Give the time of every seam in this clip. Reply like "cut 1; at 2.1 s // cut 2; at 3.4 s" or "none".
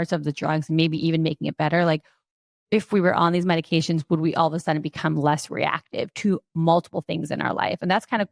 none